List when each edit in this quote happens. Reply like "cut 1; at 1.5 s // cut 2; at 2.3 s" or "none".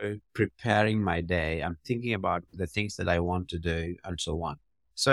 none